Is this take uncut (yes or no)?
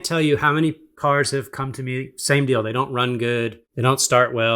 no